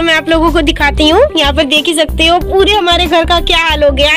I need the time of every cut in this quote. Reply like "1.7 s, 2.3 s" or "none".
none